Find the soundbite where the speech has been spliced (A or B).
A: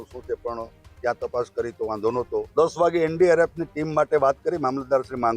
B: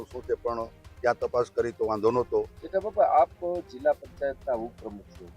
A